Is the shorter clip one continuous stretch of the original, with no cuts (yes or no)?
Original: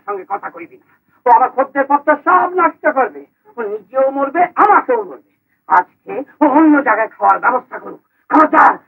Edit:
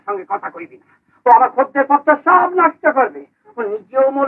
yes